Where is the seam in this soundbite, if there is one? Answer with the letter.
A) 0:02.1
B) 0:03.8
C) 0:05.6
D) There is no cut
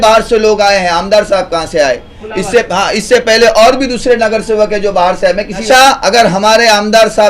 C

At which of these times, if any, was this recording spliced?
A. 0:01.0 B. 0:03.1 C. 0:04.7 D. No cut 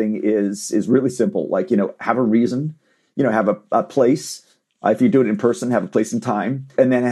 D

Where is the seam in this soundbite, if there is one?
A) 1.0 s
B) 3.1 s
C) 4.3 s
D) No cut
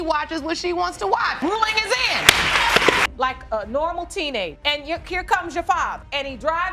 B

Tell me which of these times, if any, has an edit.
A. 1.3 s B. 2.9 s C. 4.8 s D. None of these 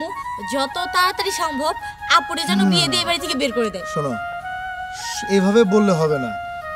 D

